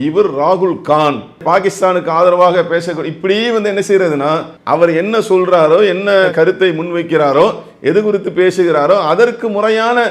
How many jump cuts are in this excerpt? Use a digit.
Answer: 2